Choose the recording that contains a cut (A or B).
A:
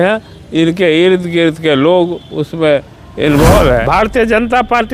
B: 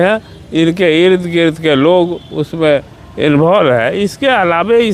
A